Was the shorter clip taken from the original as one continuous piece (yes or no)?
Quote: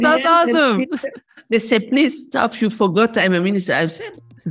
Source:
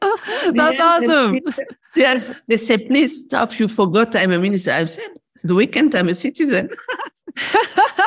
no